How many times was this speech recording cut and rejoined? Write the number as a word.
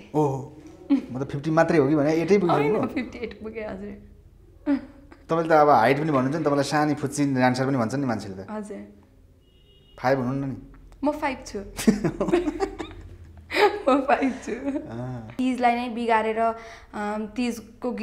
one